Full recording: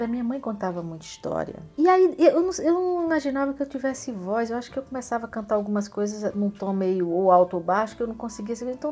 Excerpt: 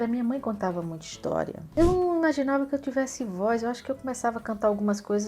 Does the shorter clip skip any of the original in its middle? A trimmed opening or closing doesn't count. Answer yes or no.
yes